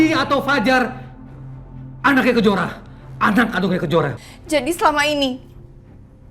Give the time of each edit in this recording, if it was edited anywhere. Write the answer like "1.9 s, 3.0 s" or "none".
4.2 s